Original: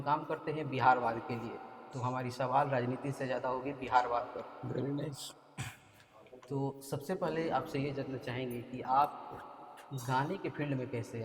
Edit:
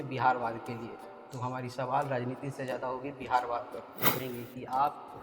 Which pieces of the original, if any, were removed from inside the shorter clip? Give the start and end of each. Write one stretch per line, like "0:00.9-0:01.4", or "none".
0:04.8-0:08.4

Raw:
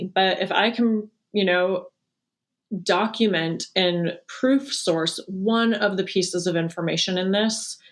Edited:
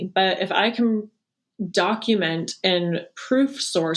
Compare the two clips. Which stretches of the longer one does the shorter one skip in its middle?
0:01.2-0:02.3

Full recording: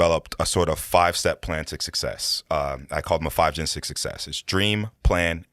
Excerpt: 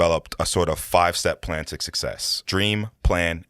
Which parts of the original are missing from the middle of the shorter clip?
0:02.3-0:04.3

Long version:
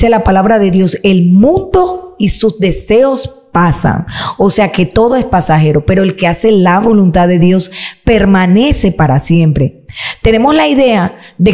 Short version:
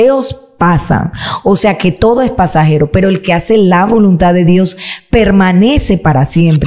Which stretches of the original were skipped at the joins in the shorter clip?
none

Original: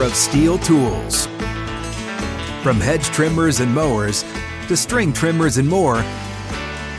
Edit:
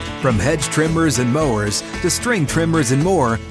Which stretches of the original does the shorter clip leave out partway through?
0:04.3-0:04.5

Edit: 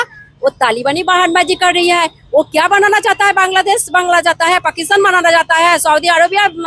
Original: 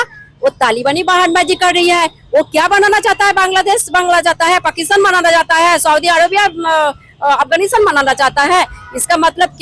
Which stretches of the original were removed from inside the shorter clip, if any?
none

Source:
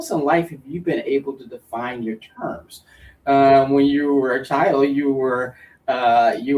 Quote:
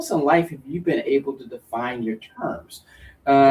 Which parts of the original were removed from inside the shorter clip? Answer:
none

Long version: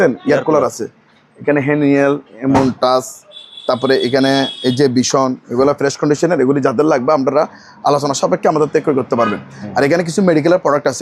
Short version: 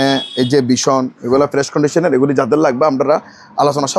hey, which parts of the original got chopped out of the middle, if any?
none

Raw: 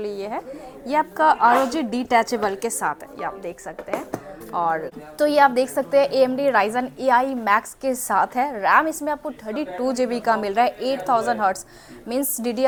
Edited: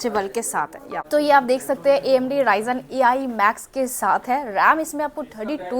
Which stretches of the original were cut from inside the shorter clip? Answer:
0:03.2-0:05.0

